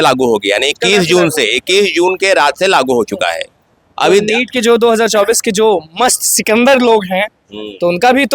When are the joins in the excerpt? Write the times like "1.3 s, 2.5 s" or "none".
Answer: none